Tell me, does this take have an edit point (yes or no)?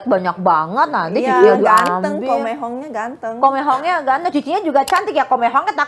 no